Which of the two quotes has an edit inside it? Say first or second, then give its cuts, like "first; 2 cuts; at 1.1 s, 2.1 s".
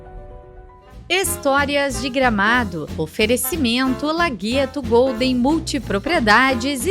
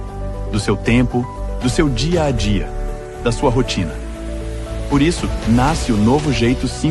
first; 1 cut; at 1.1 s